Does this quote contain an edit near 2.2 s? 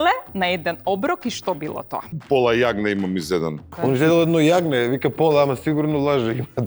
yes; 2 cuts; at 2.2 s, 3.7 s

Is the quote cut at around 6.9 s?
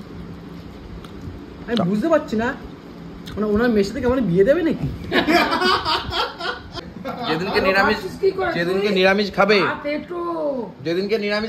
yes; 1 cut; at 6.9 s

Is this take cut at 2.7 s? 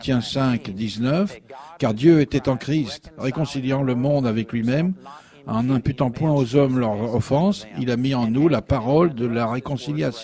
no; 1 cut; at 4.2 s

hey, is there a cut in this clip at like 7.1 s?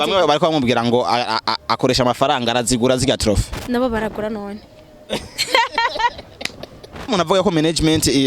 yes; 1 cut; at 7.1 s

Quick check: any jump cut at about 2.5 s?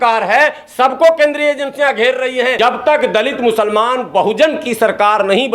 yes; 1 cut; at 2.5 s

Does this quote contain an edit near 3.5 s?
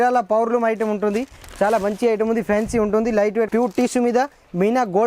yes; 1 cut; at 3.5 s

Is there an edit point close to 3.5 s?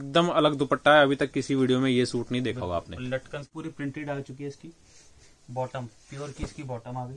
yes; 1 cut; at 3.5 s

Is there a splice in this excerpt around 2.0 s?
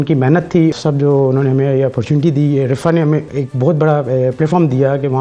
no; 2 cuts; at 0.7 s, 3.3 s

